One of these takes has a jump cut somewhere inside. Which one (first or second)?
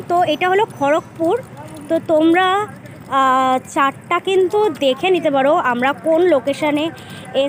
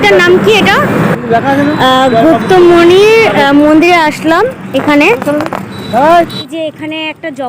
second